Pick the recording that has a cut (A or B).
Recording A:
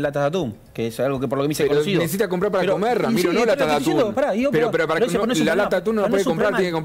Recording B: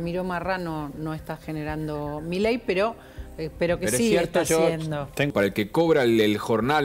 B